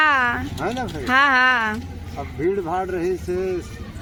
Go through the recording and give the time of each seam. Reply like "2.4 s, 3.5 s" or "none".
none